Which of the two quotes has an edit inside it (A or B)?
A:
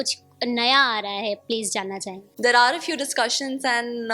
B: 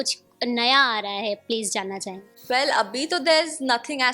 A